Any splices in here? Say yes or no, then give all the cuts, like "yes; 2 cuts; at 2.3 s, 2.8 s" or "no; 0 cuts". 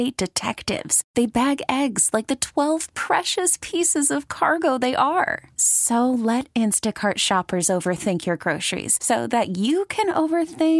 no; 0 cuts